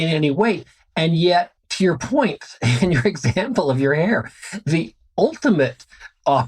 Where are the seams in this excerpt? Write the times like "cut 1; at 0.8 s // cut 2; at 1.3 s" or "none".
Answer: cut 1; at 1.6 s